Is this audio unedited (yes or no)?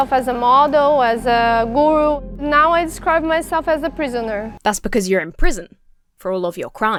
yes